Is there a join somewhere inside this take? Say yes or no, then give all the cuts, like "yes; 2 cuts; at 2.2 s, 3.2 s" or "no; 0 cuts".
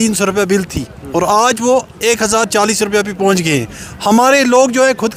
no; 0 cuts